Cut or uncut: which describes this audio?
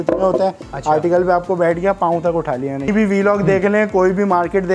cut